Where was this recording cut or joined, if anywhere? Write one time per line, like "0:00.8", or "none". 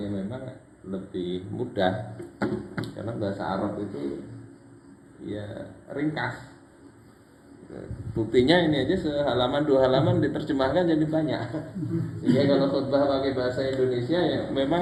none